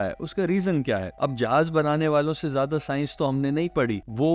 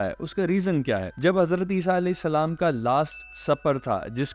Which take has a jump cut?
first; 1 cut; at 1.1 s

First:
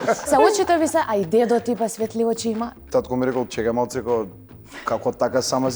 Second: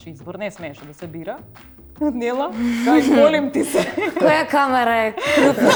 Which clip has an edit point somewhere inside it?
first; 1 cut; at 2.8 s

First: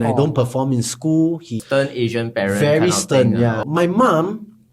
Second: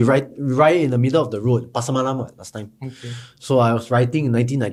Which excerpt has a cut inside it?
first; 2 cuts; at 1.6 s, 3.6 s

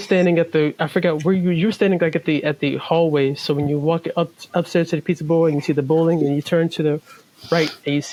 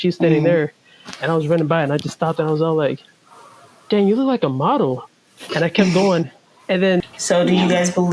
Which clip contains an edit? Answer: second; 1 cut; at 7.0 s

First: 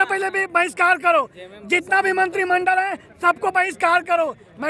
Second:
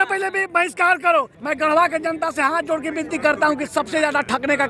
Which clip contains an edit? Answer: second; 1 cut; at 1.4 s

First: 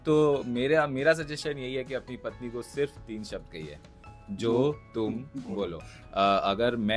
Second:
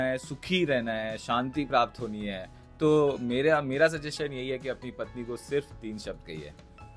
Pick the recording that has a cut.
first; 1 cut; at 5.9 s

